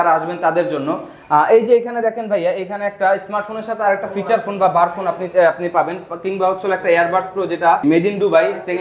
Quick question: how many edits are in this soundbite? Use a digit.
1